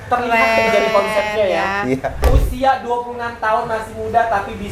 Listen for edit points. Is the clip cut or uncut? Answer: cut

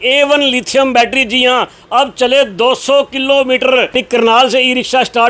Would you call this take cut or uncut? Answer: cut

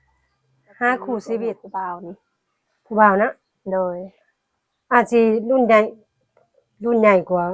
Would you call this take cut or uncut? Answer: cut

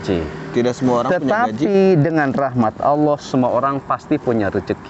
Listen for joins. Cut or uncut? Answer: uncut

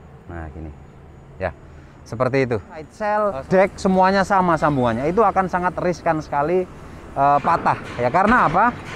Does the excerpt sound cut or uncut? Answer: cut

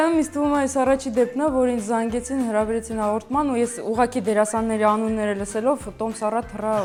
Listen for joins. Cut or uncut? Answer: uncut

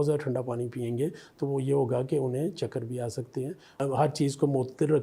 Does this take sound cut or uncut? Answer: cut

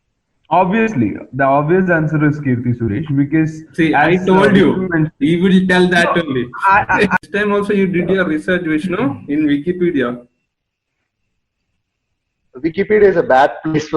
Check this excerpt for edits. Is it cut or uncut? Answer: cut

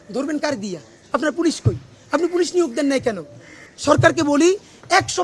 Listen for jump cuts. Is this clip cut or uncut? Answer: uncut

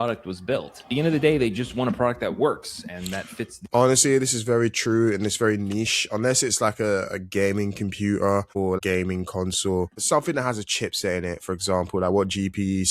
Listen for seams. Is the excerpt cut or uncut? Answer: cut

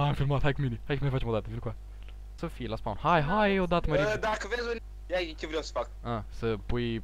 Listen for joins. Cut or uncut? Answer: cut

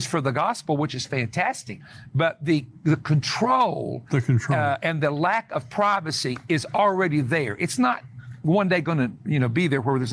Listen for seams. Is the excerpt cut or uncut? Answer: uncut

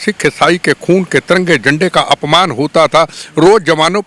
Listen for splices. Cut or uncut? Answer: uncut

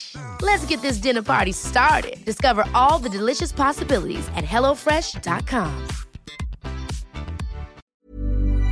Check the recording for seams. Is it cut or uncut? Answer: cut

